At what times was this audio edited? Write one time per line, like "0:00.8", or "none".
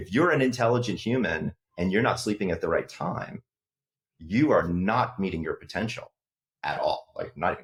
none